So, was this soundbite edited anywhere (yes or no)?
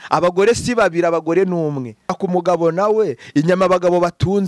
yes